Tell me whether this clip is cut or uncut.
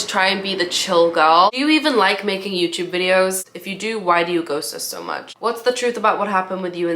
cut